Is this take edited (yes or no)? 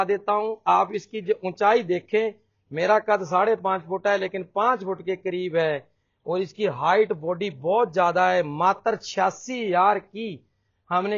no